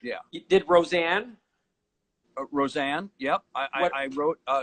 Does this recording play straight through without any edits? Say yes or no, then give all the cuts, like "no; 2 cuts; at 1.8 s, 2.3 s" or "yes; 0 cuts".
yes; 0 cuts